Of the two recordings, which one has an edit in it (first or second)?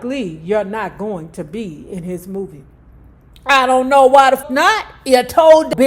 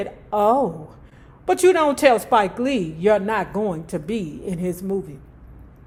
first